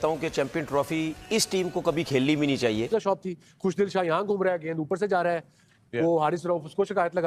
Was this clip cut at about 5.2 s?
no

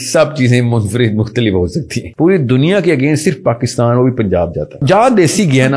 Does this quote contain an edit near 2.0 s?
yes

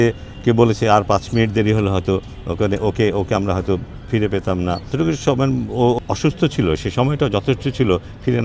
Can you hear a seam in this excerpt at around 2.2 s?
no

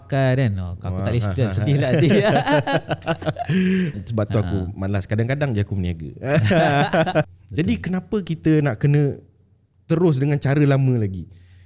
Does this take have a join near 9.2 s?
no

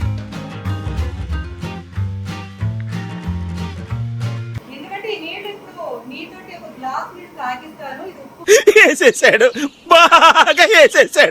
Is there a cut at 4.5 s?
yes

